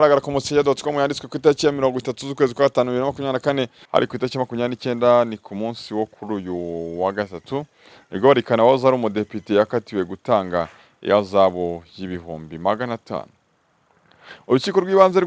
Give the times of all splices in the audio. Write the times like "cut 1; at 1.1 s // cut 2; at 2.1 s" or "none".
cut 1; at 3.8 s